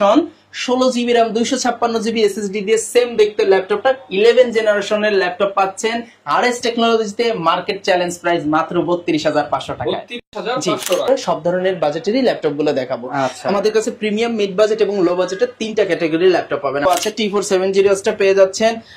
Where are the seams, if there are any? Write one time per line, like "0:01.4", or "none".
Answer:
0:11.1
0:16.8